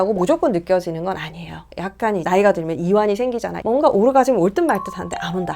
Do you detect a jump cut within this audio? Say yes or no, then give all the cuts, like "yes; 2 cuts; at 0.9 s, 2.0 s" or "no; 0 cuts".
yes; 2 cuts; at 1.7 s, 3.6 s